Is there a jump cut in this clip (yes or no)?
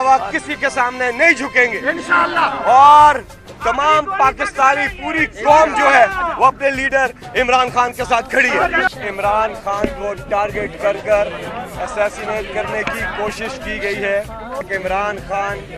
yes